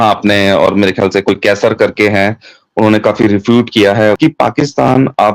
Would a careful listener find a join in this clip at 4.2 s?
yes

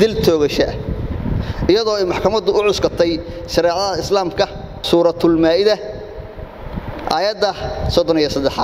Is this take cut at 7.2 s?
no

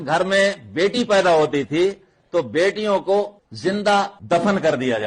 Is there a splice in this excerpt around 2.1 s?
no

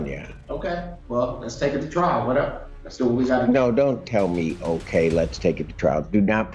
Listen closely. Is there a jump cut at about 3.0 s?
no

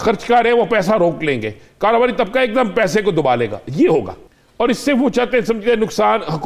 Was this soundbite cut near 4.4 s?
no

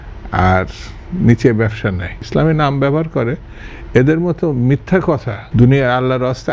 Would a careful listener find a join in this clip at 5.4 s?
yes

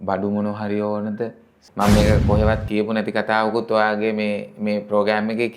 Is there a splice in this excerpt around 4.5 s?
no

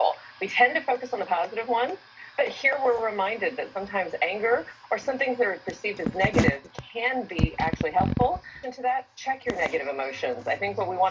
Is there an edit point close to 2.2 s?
no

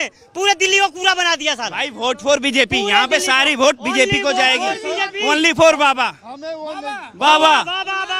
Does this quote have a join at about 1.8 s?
no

